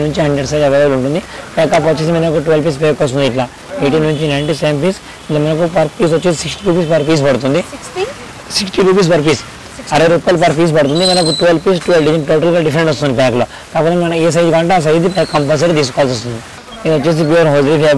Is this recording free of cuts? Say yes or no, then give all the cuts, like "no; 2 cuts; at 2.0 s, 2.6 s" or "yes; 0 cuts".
yes; 0 cuts